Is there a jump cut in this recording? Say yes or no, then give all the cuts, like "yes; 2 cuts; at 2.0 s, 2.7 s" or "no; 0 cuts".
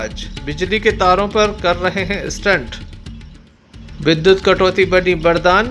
no; 0 cuts